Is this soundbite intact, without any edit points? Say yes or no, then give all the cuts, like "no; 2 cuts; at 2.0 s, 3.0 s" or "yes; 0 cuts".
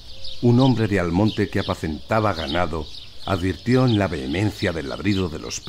no; 1 cut; at 1.1 s